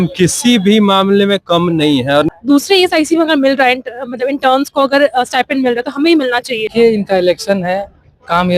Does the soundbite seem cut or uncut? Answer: cut